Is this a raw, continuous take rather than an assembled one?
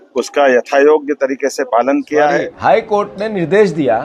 no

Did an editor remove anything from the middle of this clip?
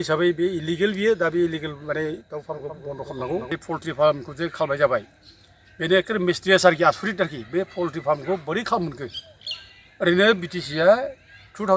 yes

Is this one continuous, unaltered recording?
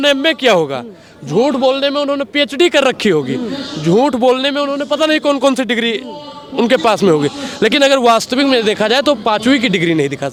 yes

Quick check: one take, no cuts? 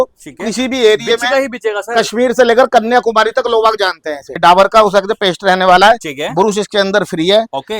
no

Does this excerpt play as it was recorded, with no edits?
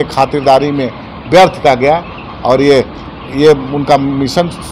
yes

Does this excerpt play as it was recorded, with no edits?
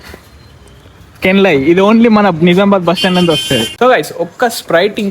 no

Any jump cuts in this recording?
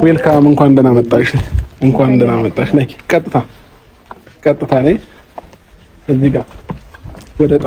no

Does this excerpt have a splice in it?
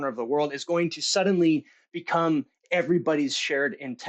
no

